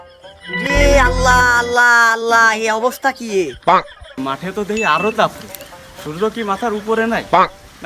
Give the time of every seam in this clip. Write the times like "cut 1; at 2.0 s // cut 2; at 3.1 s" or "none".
cut 1; at 4.2 s